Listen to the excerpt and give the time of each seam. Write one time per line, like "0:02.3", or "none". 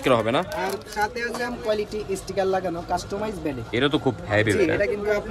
0:01.5